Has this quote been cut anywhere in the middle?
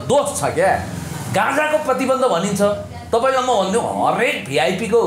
no; 0 cuts

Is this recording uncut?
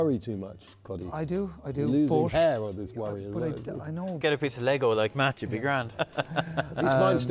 no; 2 cuts; at 4.2 s, 6.0 s

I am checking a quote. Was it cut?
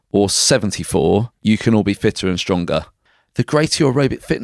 yes; 2 cuts; at 1.3 s, 2.9 s

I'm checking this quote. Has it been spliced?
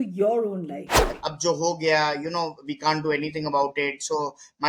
yes; 1 cut; at 1.1 s

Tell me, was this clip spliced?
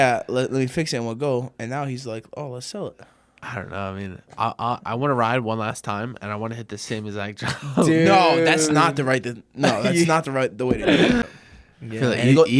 yes; 1 cut; at 11.2 s

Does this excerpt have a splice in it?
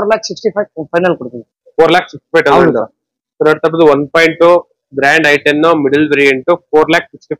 no; 0 cuts

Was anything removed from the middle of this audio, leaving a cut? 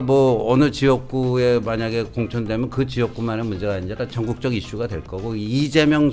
no; 0 cuts

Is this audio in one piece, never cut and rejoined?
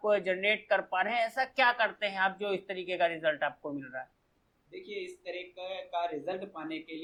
yes; 0 cuts

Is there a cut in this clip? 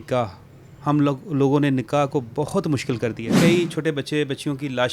yes; 1 cut; at 3.3 s

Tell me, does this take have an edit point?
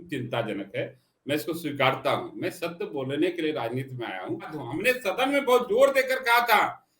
yes; 1 cut; at 4.6 s

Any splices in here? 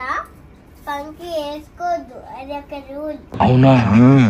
no; 0 cuts

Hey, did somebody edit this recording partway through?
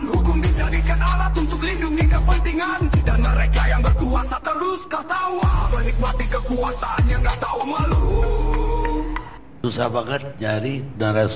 yes; 1 cut; at 9.4 s

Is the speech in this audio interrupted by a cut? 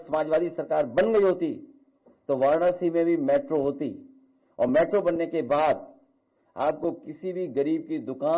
no; 0 cuts

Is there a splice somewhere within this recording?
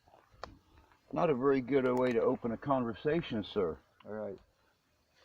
yes; 1 cut; at 3.9 s

